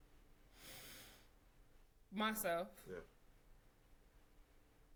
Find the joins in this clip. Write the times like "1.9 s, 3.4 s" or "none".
none